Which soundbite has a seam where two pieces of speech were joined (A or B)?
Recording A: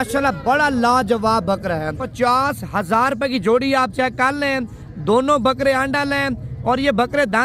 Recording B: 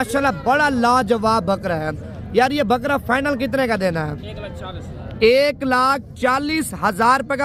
A